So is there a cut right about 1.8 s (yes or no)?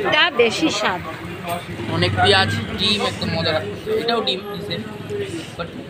yes